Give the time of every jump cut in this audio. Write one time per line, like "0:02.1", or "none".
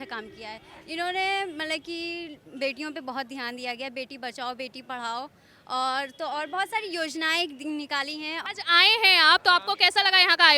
0:08.4